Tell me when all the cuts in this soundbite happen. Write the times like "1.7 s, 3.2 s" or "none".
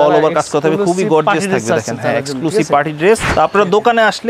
3.3 s